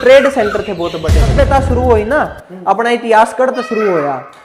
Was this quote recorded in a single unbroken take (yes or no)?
no